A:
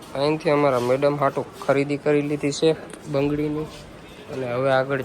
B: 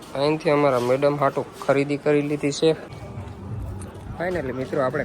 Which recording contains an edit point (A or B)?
B